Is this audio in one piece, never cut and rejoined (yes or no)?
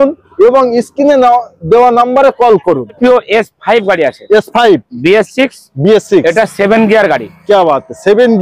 no